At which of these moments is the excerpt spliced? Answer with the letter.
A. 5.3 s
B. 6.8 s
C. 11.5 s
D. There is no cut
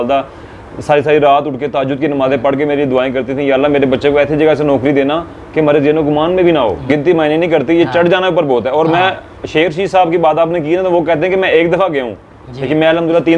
B